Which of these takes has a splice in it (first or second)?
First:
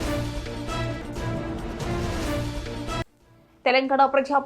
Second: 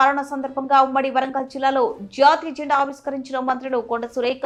first